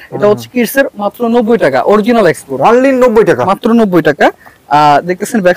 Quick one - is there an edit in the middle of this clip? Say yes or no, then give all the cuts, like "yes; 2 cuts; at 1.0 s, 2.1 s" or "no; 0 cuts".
no; 0 cuts